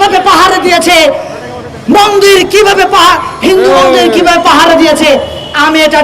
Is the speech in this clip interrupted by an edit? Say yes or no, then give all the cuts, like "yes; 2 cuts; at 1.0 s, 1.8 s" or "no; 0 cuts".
no; 0 cuts